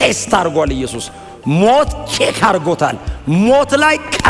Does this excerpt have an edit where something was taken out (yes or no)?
no